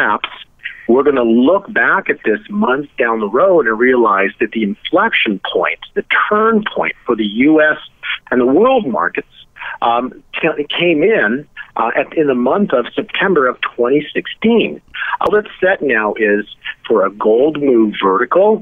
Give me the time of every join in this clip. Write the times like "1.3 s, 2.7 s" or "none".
15.3 s